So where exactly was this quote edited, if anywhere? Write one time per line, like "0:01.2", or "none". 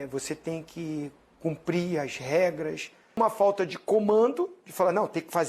0:03.2